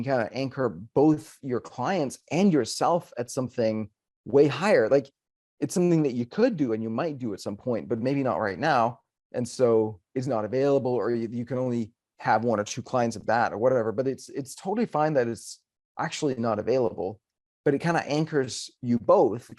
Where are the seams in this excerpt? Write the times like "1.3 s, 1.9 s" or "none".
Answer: none